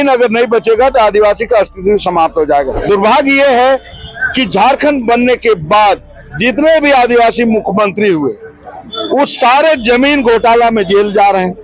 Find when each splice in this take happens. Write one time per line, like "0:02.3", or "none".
0:02.8